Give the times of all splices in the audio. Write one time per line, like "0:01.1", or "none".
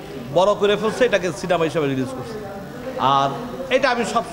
none